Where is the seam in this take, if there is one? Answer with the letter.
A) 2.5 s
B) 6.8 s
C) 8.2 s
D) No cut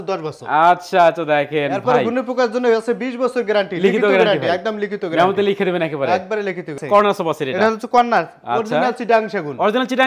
B